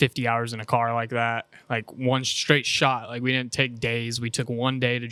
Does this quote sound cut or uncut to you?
uncut